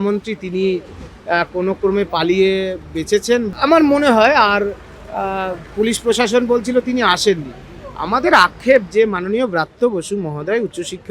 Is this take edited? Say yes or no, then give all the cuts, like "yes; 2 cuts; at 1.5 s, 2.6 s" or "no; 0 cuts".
yes; 1 cut; at 3.5 s